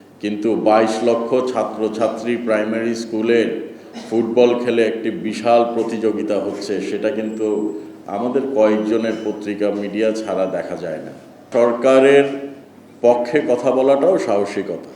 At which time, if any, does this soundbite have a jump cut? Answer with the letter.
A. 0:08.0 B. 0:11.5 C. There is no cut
B